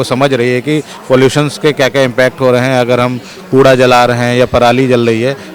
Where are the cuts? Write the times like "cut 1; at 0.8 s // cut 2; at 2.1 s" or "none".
none